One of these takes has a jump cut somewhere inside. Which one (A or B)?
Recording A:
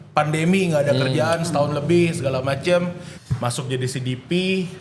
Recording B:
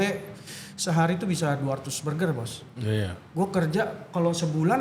A